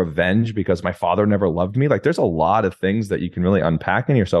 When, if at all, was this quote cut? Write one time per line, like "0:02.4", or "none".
none